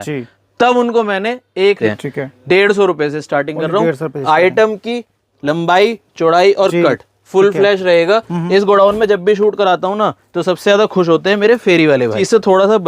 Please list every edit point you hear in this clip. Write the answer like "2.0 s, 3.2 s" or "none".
1.8 s, 12.1 s